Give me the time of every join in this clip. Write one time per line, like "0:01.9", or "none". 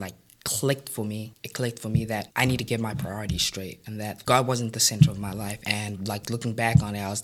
0:01.4
0:02.3
0:04.2
0:05.6